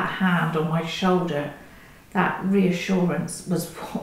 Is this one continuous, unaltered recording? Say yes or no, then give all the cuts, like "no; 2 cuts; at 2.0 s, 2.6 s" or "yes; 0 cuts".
yes; 0 cuts